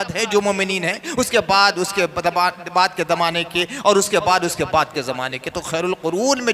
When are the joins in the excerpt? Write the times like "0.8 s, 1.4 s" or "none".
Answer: none